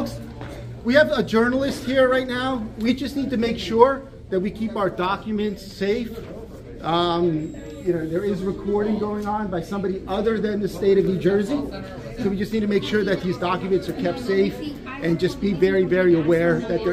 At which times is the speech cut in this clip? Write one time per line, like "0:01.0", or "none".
none